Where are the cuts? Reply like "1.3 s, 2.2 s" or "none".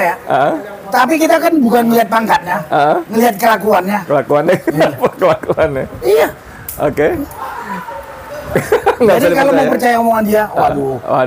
none